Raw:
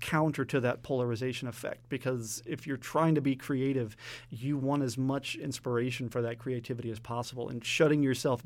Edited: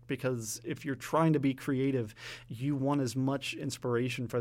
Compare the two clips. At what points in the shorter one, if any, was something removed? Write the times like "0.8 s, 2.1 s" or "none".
none